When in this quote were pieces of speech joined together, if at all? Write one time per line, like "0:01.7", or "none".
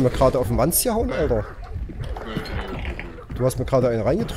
none